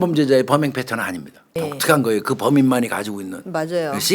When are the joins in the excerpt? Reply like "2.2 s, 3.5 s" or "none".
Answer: 1.5 s